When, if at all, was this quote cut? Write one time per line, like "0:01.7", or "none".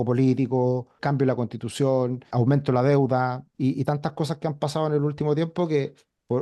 0:01.0
0:02.2
0:03.4